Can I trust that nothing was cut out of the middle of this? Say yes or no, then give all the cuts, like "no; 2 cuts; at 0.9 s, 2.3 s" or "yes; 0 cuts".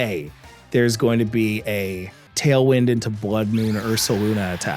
no; 1 cut; at 2.3 s